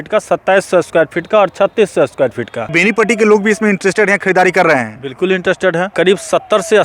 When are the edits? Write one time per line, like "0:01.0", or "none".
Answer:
0:02.7
0:05.9